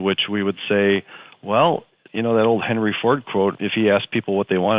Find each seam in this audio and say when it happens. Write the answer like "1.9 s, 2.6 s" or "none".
2.0 s, 3.5 s